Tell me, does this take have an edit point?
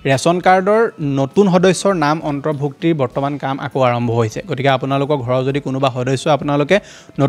no; 0 cuts

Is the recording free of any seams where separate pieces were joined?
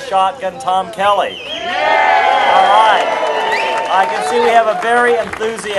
yes; 0 cuts

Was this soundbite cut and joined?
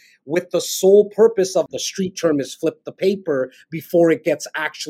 yes; 1 cut; at 1.7 s

